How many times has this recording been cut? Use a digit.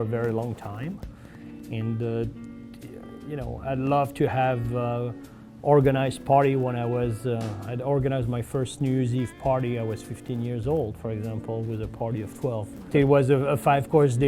1